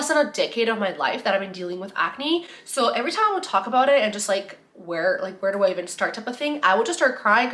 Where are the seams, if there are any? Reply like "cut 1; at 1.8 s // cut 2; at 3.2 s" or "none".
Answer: none